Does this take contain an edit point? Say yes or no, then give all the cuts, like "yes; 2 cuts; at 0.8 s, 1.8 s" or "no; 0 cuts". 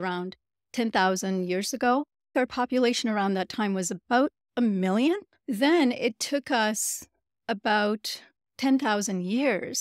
yes; 2 cuts; at 2.3 s, 5.3 s